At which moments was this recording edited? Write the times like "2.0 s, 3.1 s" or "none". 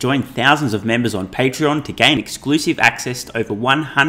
none